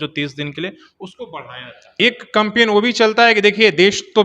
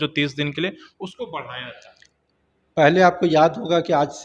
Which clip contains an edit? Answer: first; 1 cut; at 1.9 s

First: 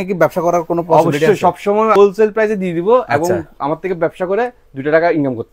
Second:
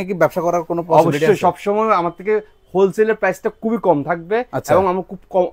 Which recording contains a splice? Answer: first; 1 cut; at 2.0 s

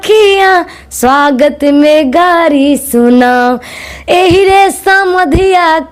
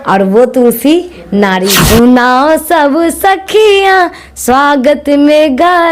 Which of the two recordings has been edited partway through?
second; 1 cut; at 1.8 s

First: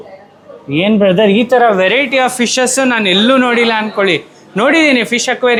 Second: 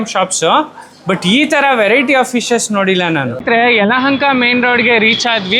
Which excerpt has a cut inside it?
second; 1 cut; at 3.2 s

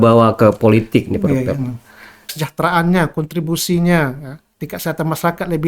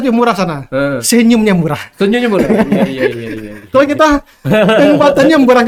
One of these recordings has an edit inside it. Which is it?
first; 1 cut; at 2.3 s

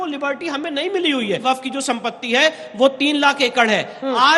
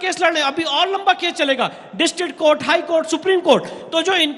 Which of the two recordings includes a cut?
first; 1 cut; at 1.4 s

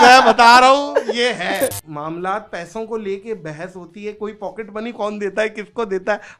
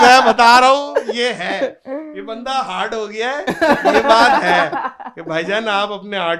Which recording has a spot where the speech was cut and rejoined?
first; 1 cut; at 1.8 s

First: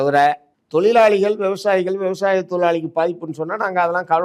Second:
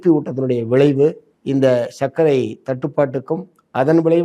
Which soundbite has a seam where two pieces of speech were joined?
second; 1 cut; at 1.3 s

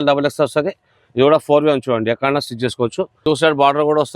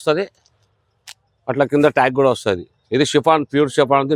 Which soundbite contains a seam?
first; 1 cut; at 3.1 s

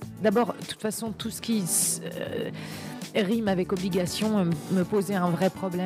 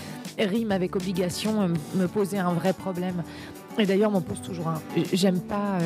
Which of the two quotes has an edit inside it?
second; 1 cut; at 4.9 s

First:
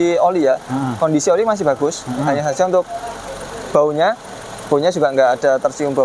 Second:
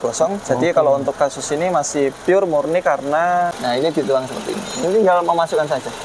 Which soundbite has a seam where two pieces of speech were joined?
second; 1 cut; at 3.6 s

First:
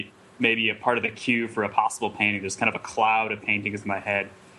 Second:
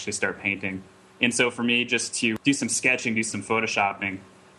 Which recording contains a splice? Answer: second; 1 cut; at 2.4 s

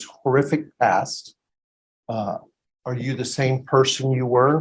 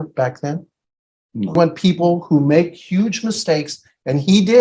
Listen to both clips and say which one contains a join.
second; 1 cut; at 1.6 s

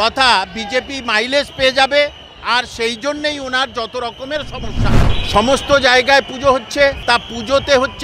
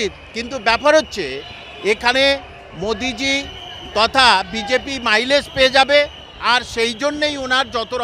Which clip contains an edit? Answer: first; 2 cuts; at 5.1 s, 7.0 s

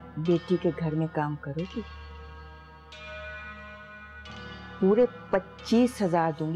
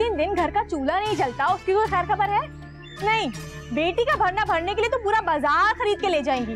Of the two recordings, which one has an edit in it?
first; 1 cut; at 4.8 s

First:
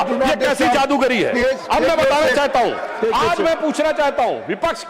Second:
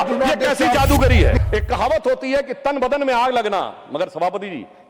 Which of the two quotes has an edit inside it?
second; 1 cut; at 1.4 s

